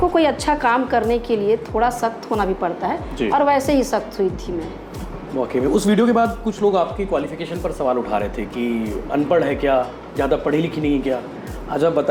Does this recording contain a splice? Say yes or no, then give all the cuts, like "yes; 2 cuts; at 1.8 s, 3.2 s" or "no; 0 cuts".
no; 0 cuts